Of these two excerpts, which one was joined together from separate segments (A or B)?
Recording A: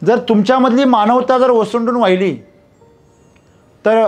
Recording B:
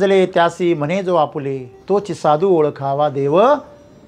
B